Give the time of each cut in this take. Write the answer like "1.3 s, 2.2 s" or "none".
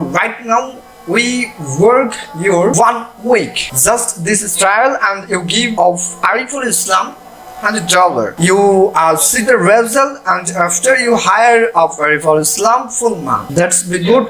2.7 s, 3.6 s, 5.7 s, 8.3 s, 13.4 s